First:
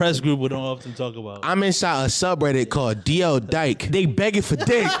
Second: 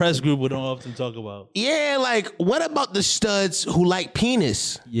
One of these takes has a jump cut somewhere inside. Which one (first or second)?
first